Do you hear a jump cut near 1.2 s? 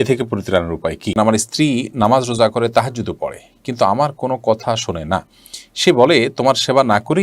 yes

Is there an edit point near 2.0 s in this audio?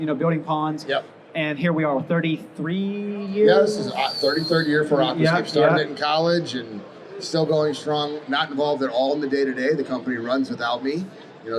no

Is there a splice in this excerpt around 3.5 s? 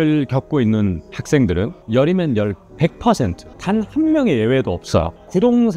yes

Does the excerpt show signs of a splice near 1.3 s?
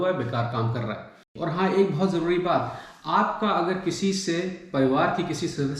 yes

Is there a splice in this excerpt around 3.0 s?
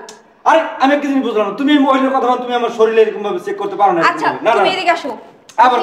no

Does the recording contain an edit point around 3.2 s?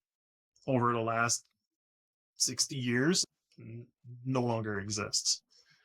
yes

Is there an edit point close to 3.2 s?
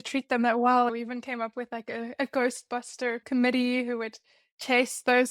yes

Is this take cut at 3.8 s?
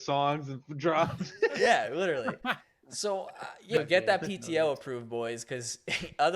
yes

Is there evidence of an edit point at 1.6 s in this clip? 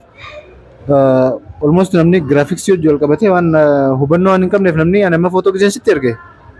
no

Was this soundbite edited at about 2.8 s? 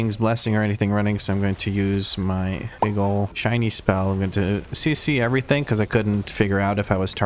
no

